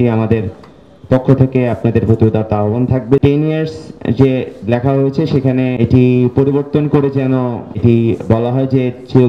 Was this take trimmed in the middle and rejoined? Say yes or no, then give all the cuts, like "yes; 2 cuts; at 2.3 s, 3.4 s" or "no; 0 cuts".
yes; 3 cuts; at 3.2 s, 5.8 s, 7.7 s